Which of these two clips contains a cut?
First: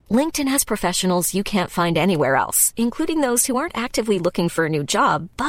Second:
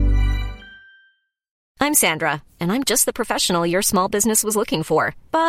second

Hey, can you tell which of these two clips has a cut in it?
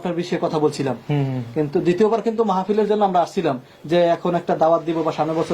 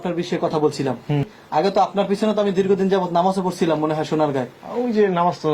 second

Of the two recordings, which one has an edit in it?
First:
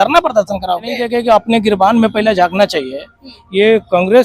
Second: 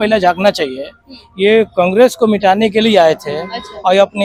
first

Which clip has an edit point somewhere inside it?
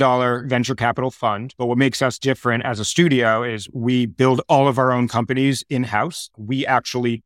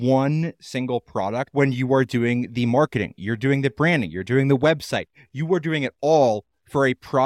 second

